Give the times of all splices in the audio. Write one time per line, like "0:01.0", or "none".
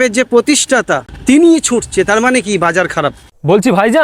0:01.1